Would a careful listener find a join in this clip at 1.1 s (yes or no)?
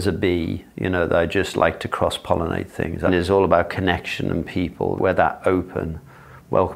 no